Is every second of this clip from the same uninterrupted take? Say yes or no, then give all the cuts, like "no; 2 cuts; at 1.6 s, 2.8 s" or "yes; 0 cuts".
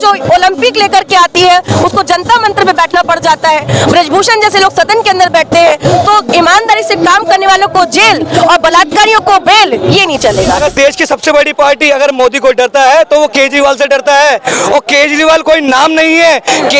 no; 1 cut; at 10.6 s